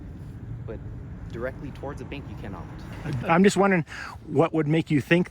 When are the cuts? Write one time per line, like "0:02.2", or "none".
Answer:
0:03.1